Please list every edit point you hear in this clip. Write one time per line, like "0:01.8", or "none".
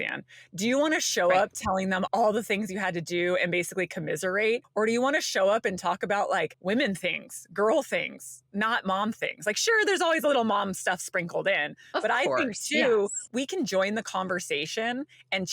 0:02.1
0:04.7
0:06.6
0:13.2